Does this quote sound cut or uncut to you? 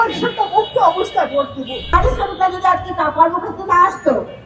cut